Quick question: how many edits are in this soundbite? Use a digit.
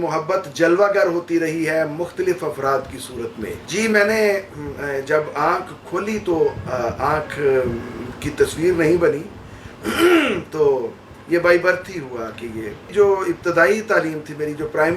0